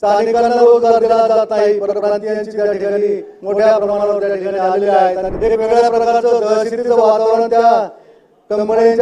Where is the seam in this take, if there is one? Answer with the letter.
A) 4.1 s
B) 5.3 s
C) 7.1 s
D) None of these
B